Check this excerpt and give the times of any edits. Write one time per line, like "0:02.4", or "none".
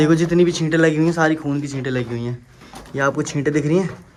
none

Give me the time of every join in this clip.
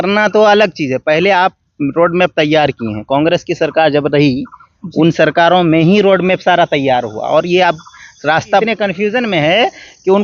0:08.6

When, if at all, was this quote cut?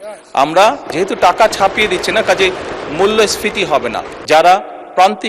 0:04.1

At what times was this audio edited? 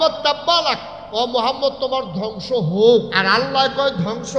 0:00.9
0:03.2

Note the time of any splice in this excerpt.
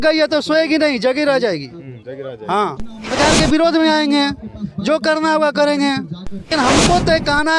0:03.1
0:06.5

